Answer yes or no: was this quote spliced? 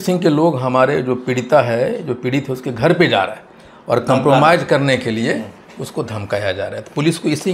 no